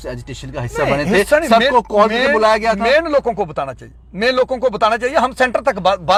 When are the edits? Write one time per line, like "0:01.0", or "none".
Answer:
none

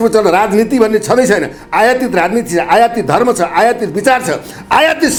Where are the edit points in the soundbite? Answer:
none

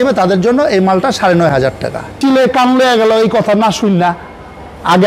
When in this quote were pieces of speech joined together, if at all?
0:02.1

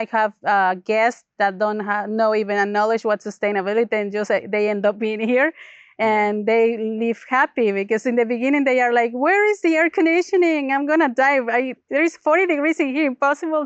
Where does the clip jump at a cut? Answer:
none

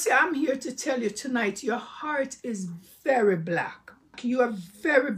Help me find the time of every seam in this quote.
0:04.2

